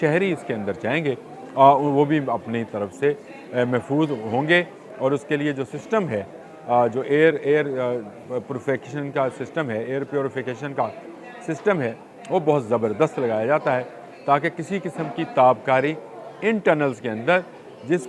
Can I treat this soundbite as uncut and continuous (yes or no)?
yes